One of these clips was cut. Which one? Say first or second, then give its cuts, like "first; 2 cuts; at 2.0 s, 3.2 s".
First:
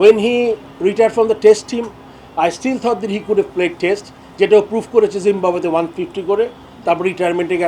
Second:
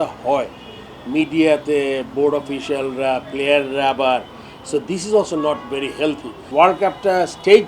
second; 1 cut; at 6.5 s